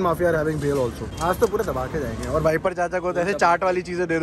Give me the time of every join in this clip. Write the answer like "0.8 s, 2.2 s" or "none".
1.1 s